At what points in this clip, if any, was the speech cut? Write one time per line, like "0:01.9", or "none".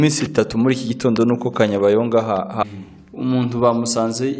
0:02.6